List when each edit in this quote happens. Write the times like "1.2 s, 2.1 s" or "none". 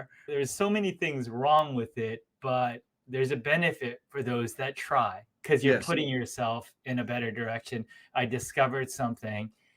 5.3 s